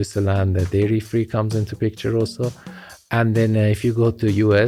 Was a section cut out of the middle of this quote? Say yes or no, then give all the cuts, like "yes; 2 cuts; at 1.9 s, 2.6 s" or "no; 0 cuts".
no; 0 cuts